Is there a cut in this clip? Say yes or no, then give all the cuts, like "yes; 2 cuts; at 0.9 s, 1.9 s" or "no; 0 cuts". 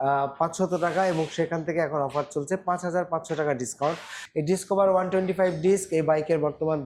yes; 1 cut; at 4.1 s